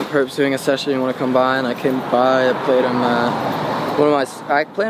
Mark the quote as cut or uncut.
uncut